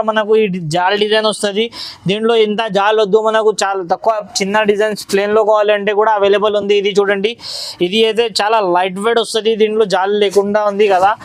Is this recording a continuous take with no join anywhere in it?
yes; 0 cuts

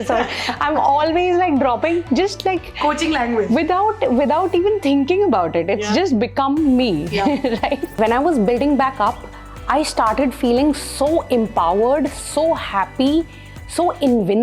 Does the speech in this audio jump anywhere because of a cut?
yes; 1 cut; at 8.0 s

